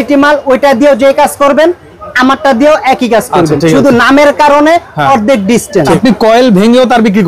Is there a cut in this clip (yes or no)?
yes